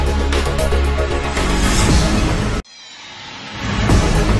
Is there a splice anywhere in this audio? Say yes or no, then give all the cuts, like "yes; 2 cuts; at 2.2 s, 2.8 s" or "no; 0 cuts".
no; 0 cuts